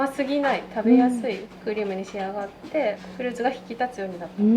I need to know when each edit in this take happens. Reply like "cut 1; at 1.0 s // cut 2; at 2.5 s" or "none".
cut 1; at 1.5 s // cut 2; at 3.0 s